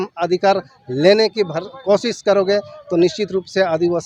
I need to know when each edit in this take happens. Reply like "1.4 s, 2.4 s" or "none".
none